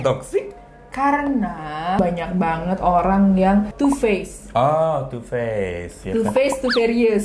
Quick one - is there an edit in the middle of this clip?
yes; 2 cuts; at 2.0 s, 3.7 s

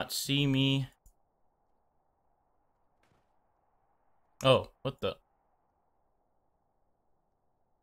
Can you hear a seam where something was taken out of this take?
yes; 1 cut; at 1.0 s

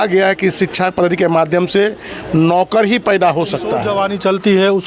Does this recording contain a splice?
yes; 1 cut; at 3.8 s

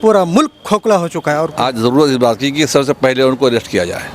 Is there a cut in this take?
yes; 1 cut; at 1.5 s

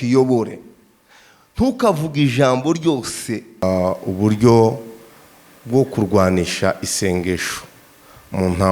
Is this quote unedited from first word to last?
no; 1 cut; at 3.6 s

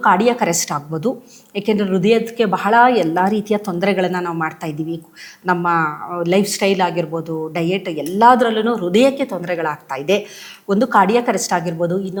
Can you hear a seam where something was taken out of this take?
no; 0 cuts

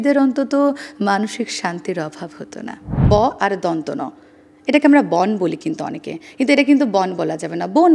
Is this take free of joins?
no; 1 cut; at 3.0 s

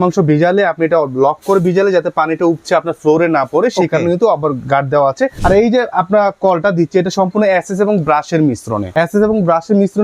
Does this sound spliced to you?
yes; 2 cuts; at 5.4 s, 8.9 s

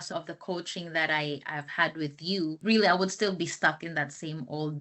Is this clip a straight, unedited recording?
yes; 0 cuts

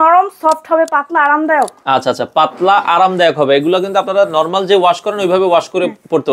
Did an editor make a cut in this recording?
no; 0 cuts

